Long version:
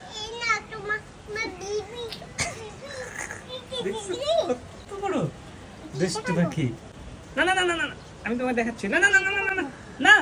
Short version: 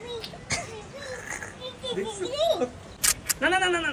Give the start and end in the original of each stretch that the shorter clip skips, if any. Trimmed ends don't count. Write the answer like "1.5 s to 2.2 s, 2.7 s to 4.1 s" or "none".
4.8 s to 6.9 s